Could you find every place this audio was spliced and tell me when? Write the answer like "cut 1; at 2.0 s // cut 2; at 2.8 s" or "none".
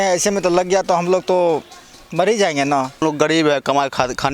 cut 1; at 3.0 s